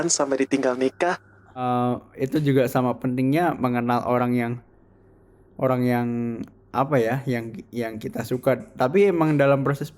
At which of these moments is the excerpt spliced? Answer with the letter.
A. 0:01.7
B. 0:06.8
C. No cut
A